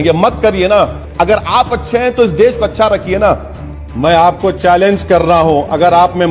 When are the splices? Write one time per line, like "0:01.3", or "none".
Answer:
0:01.0
0:03.8